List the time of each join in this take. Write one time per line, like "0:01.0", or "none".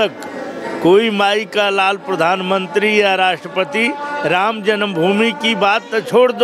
none